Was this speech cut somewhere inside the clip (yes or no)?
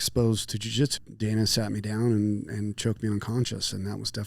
yes